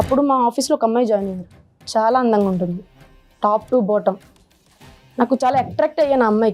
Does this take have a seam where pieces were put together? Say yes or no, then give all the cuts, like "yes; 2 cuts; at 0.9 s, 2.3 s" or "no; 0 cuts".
no; 0 cuts